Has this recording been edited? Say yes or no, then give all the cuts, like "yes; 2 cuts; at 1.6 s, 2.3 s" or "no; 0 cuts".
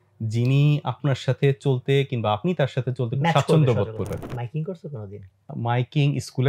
yes; 2 cuts; at 4.3 s, 5.5 s